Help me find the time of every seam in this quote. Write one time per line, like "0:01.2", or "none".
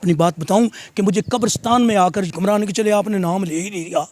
0:02.3